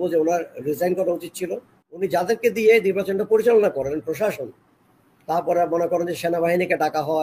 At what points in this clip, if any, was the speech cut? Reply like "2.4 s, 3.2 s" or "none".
1.9 s